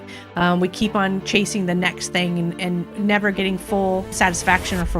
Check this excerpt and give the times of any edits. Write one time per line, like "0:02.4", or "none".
0:02.9
0:04.1